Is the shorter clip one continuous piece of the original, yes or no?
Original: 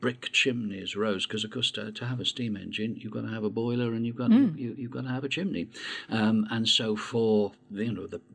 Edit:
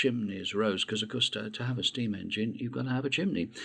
no